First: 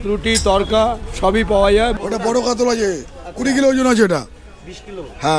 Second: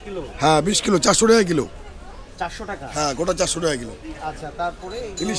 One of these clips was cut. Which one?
first; 1 cut; at 1.9 s

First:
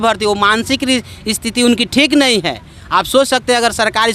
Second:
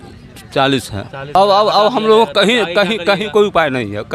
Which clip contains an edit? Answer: second; 1 cut; at 1.4 s

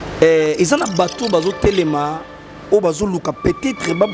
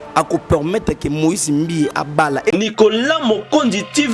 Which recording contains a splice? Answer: second; 1 cut; at 2.5 s

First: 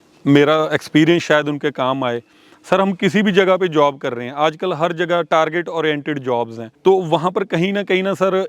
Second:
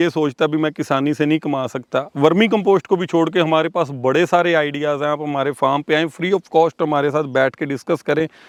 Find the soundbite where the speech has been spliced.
first; 1 cut; at 6.6 s

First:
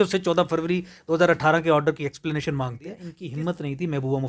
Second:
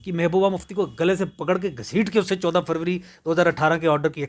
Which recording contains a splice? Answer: first; 1 cut; at 3.1 s

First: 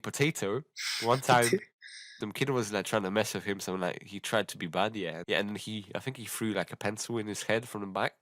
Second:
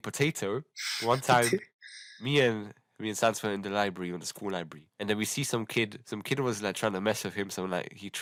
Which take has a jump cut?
first; 2 cuts; at 2.1 s, 5.2 s

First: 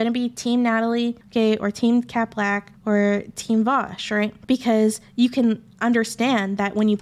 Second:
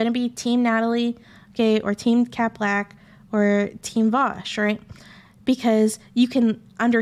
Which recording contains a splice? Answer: first; 3 cuts; at 1.2 s, 2.7 s, 4.4 s

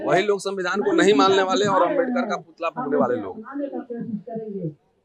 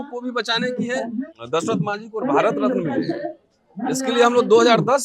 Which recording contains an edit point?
second; 1 cut; at 1.3 s

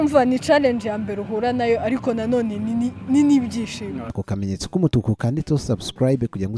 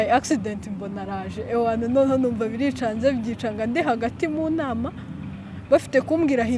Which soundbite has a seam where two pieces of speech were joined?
first; 1 cut; at 4.1 s

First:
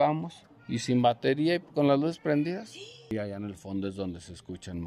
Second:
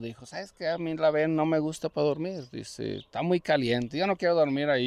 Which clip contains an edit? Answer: first; 1 cut; at 3.1 s

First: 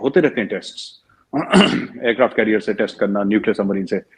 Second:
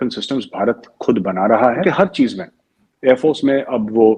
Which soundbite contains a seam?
second; 1 cut; at 1.8 s

